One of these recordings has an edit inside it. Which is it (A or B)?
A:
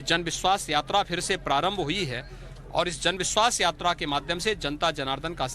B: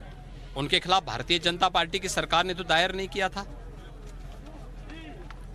A